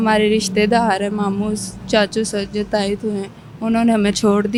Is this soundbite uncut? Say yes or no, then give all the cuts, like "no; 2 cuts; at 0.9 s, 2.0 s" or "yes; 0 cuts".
yes; 0 cuts